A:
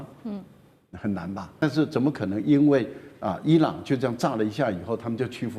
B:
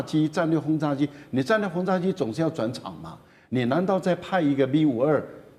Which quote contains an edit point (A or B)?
A